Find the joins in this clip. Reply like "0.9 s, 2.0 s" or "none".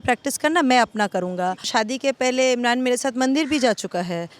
1.6 s